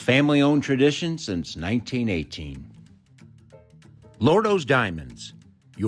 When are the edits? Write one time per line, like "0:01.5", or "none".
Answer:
0:02.6
0:04.1